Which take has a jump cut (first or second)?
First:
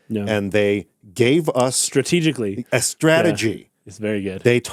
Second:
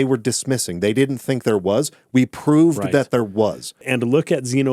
second